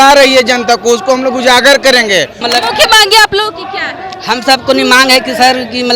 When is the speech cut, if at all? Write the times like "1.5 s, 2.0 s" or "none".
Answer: 2.4 s